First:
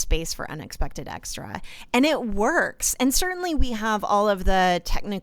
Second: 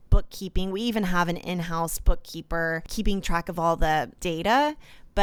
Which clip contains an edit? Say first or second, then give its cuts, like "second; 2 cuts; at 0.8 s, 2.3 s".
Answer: second; 2 cuts; at 2.8 s, 4.2 s